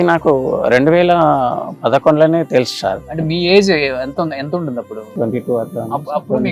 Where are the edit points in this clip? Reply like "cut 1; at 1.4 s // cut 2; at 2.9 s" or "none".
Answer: cut 1; at 5.1 s